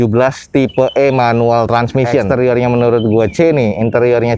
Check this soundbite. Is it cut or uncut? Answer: cut